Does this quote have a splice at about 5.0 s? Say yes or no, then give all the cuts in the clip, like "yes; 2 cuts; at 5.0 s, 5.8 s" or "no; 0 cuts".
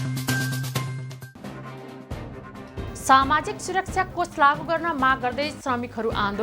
no; 1 cut; at 1.0 s